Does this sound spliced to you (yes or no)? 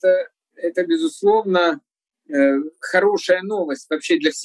no